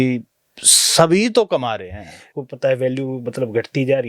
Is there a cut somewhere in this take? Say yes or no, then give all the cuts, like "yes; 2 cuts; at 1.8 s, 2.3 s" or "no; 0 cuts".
yes; 1 cut; at 2.3 s